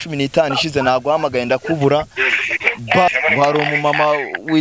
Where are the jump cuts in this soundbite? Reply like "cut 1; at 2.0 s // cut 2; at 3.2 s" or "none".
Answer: cut 1; at 3.1 s